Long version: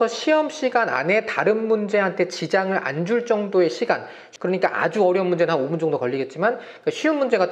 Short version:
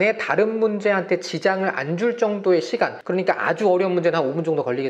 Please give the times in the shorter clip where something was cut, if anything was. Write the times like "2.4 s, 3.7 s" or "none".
3.0 s